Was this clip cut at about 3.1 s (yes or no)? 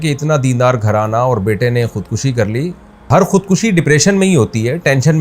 yes